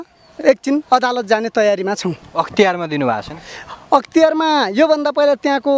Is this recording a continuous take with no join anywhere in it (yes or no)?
yes